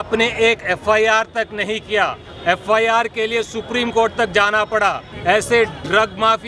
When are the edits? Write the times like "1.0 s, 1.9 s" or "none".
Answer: 5.1 s